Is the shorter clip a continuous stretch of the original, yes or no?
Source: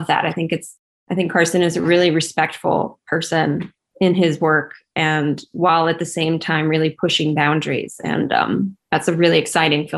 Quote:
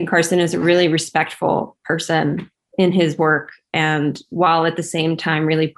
yes